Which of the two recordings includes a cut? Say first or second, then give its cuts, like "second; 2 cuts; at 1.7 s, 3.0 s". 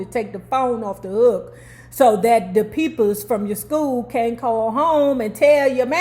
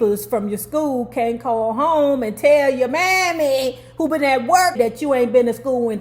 second; 1 cut; at 4.8 s